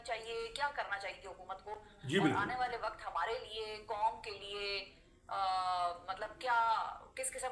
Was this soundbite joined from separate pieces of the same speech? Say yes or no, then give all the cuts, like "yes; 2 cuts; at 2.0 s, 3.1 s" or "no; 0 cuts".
no; 0 cuts